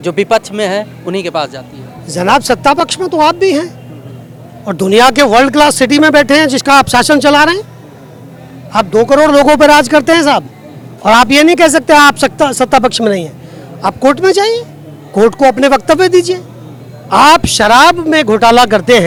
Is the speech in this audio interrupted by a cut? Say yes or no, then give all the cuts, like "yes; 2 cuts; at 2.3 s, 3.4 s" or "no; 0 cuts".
no; 0 cuts